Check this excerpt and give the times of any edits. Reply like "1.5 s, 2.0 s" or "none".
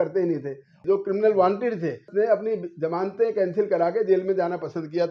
0.8 s, 2.1 s